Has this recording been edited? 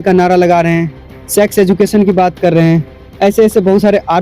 no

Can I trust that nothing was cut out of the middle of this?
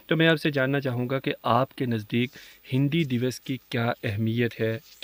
yes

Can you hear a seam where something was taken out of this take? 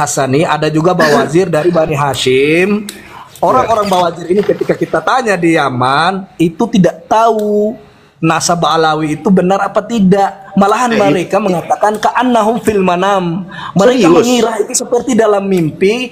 no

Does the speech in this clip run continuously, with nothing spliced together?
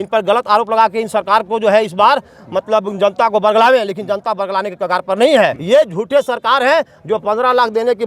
no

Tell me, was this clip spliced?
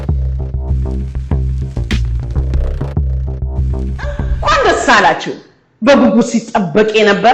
yes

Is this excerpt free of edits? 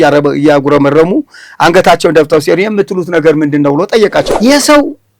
no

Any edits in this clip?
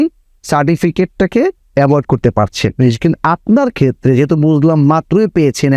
no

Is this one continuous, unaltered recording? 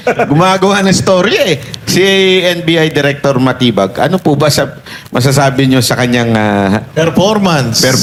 yes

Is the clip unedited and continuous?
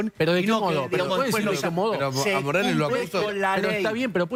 yes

